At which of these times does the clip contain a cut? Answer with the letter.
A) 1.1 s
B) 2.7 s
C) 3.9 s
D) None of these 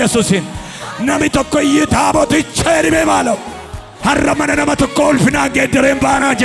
C